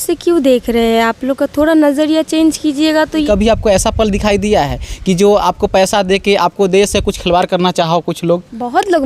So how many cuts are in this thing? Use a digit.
1